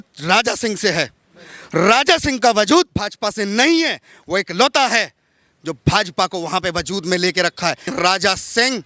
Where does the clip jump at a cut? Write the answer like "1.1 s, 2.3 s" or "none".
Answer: 7.9 s